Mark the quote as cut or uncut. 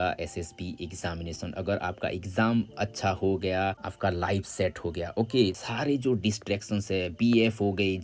cut